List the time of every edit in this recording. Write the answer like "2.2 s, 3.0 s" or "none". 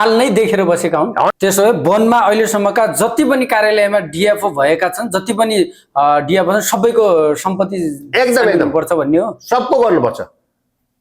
1.3 s